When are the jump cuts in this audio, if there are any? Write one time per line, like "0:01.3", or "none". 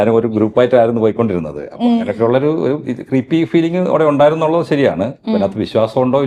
none